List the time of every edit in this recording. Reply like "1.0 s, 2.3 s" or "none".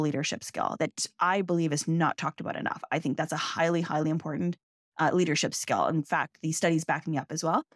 none